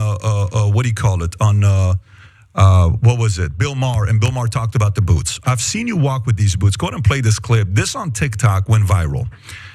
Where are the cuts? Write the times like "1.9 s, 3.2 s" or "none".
4.9 s